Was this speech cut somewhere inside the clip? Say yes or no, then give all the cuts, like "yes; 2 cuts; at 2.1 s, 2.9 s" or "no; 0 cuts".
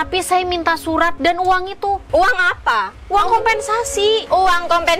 yes; 3 cuts; at 1.2 s, 2.0 s, 4.2 s